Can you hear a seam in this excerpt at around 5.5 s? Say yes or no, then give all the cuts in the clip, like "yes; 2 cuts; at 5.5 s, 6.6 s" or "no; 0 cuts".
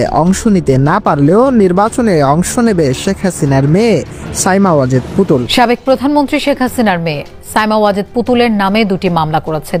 yes; 1 cut; at 5.5 s